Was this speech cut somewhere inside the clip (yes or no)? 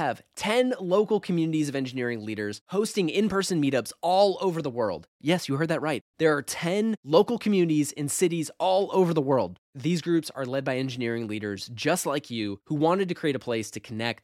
no